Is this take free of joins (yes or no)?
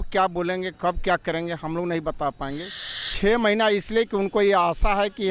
no